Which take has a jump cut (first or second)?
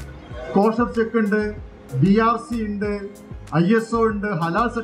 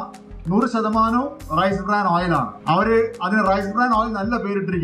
second